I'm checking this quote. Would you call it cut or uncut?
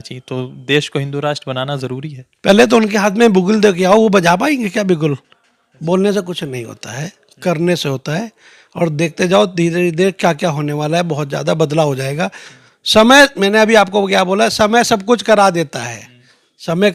uncut